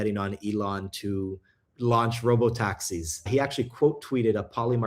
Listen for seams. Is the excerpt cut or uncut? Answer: cut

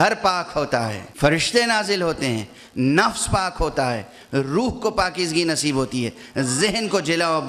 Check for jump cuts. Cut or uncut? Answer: cut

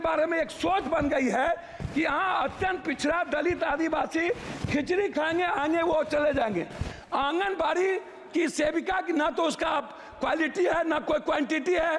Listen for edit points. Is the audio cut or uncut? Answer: uncut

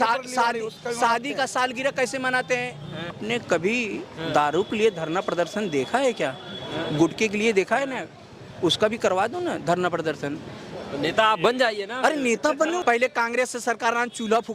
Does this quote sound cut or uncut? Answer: cut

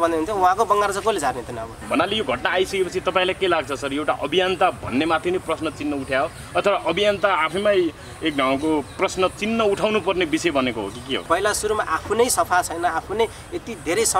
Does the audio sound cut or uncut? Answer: cut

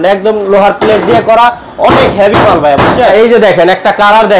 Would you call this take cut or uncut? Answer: cut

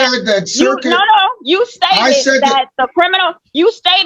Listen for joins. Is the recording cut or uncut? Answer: uncut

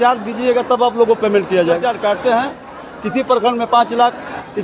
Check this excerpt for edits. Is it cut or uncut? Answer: cut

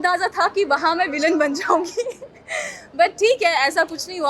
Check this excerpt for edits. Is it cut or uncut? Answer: uncut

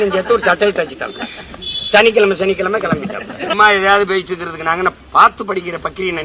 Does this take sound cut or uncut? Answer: cut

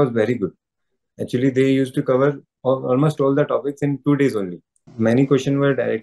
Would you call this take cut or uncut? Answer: cut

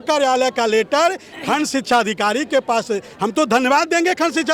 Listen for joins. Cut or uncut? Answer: uncut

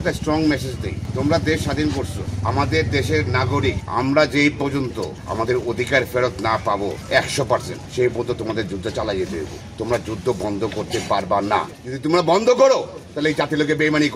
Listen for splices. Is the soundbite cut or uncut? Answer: cut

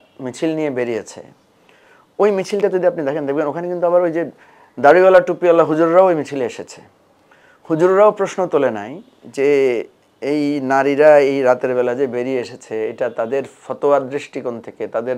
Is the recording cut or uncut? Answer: uncut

